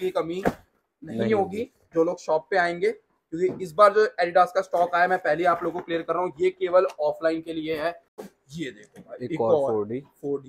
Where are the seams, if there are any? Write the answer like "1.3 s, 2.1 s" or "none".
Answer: 8.2 s